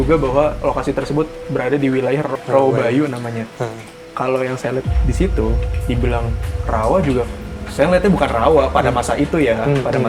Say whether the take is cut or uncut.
cut